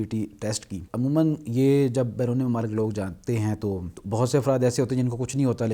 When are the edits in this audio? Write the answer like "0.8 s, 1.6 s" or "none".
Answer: 0.8 s, 3.9 s